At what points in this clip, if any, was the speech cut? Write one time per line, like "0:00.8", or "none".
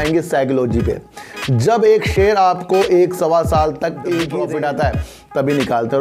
0:04.4